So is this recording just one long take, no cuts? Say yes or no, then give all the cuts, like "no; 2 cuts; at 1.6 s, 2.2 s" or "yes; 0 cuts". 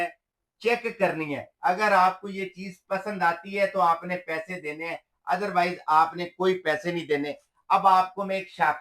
yes; 0 cuts